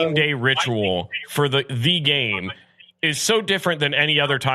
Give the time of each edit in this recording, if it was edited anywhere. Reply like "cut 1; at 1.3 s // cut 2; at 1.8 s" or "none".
none

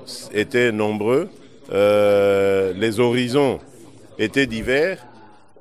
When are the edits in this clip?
none

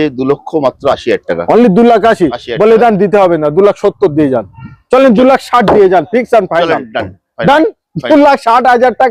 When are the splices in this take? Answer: none

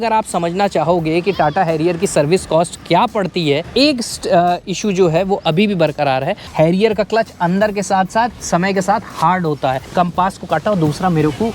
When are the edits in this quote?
cut 1; at 3.7 s // cut 2; at 6.4 s // cut 3; at 9.8 s

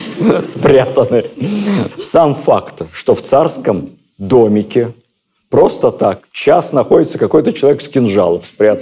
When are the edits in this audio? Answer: none

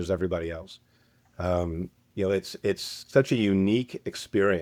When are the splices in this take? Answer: none

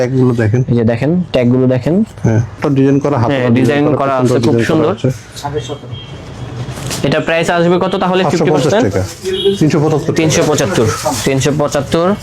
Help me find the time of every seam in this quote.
cut 1; at 2.6 s

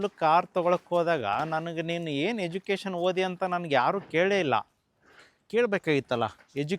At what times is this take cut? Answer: none

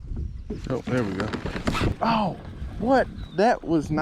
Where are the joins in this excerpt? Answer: cut 1; at 1.9 s

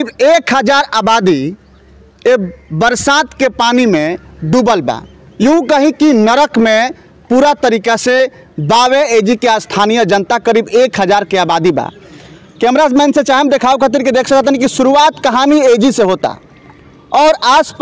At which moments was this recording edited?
none

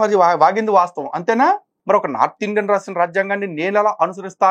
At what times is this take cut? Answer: cut 1; at 1.7 s

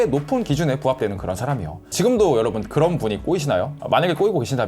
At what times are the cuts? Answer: cut 1; at 1.8 s

